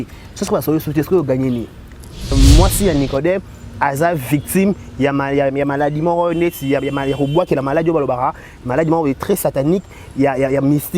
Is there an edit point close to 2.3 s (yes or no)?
yes